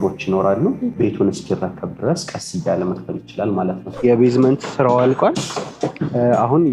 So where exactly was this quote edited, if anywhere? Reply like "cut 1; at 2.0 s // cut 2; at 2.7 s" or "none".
cut 1; at 0.9 s // cut 2; at 4.0 s